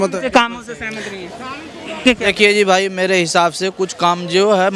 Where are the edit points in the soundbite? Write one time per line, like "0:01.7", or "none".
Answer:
0:02.0